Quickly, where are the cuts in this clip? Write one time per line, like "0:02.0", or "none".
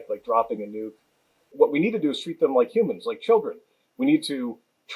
0:01.5